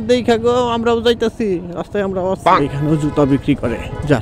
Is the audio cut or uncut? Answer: cut